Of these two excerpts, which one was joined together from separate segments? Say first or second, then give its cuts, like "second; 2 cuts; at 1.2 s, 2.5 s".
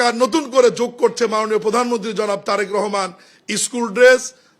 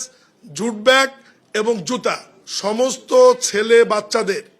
second; 1 cut; at 2.3 s